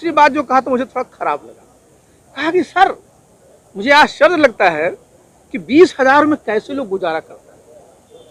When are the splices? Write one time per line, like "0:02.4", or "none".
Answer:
none